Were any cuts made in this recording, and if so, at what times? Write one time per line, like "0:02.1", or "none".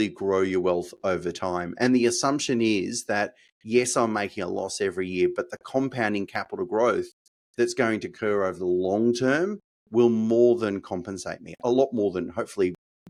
none